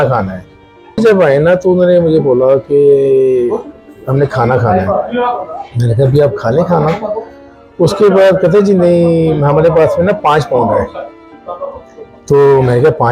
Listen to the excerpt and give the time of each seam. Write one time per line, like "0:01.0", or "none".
0:01.0